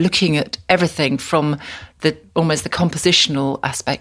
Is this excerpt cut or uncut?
uncut